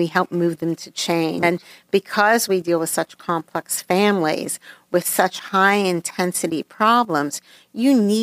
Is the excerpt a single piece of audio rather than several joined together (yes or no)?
no